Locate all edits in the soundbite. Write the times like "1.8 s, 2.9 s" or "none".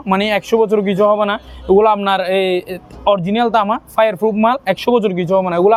none